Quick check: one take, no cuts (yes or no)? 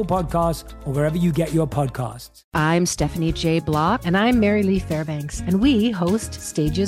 no